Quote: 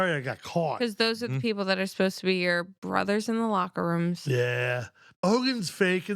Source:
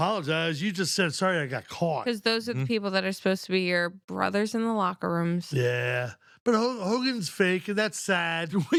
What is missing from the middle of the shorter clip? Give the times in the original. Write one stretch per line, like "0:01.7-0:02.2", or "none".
0:06.4-0:06.7